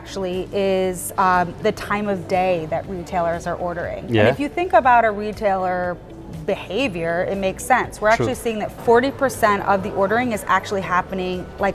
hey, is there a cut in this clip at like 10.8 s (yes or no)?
no